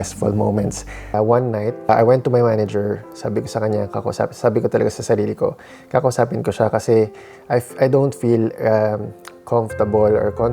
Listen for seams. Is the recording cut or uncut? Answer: cut